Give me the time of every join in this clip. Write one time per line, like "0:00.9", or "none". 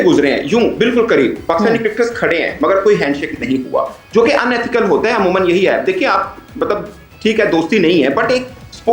none